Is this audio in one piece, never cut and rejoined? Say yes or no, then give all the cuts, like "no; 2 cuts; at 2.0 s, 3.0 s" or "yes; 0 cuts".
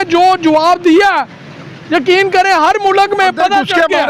yes; 0 cuts